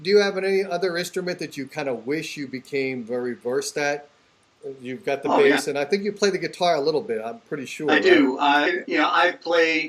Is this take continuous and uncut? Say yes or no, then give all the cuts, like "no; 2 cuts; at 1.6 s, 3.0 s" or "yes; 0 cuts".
no; 1 cut; at 8.7 s